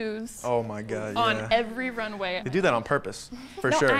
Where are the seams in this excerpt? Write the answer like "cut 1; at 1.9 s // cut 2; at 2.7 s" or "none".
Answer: cut 1; at 2.4 s